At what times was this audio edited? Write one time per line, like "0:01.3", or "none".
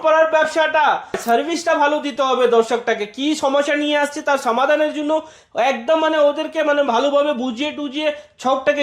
0:01.2